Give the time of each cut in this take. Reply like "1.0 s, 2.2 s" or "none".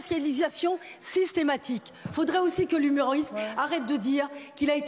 2.0 s